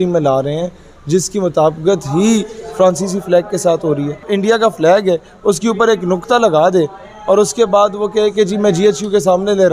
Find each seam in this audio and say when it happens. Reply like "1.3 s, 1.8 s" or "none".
4.3 s